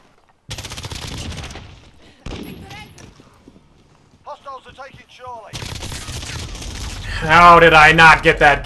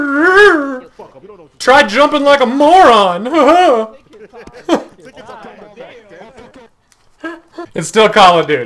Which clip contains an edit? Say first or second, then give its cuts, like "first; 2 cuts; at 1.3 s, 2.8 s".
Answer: second; 1 cut; at 7.6 s